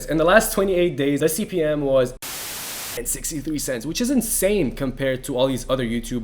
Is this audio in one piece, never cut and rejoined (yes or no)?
no